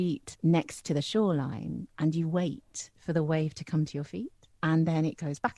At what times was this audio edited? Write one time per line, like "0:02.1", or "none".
0:01.8
0:04.4

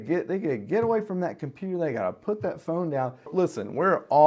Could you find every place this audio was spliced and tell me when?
0:03.3

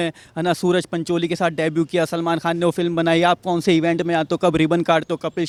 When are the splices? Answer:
none

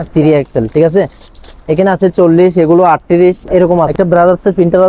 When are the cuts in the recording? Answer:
0:03.9

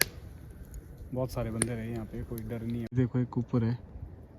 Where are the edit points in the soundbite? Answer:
0:02.8

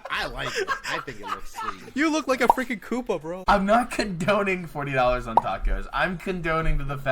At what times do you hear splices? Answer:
0:03.4

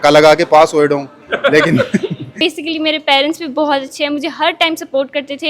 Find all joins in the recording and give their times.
0:02.3

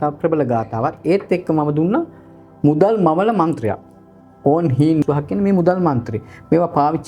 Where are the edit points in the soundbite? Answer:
0:05.0

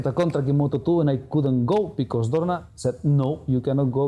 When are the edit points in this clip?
none

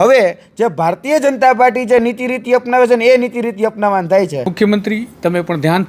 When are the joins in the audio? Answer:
0:04.5

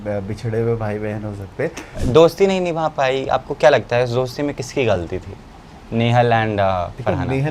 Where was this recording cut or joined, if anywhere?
0:02.0

